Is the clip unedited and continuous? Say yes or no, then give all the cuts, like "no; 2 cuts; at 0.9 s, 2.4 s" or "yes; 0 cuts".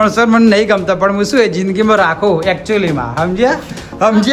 yes; 0 cuts